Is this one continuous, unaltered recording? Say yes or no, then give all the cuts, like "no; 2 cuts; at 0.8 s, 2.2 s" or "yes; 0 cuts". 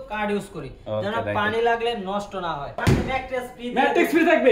no; 1 cut; at 2.8 s